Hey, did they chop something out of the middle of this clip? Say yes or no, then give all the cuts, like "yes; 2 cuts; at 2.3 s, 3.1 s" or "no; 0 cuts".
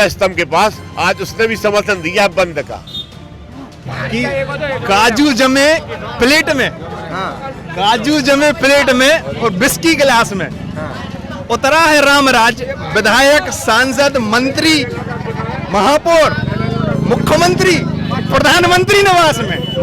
yes; 1 cut; at 3.9 s